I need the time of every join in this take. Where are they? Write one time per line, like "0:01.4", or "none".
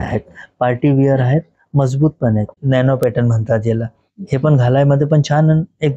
0:02.6